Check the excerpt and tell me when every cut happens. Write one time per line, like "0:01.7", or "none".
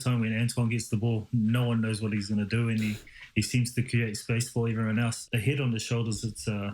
0:05.2